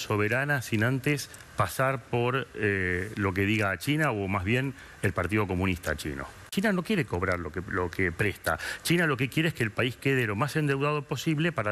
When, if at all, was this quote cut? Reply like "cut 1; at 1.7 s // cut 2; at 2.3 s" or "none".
cut 1; at 6.5 s